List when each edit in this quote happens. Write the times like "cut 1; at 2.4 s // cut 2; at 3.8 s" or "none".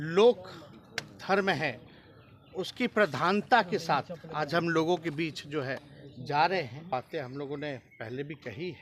cut 1; at 6.9 s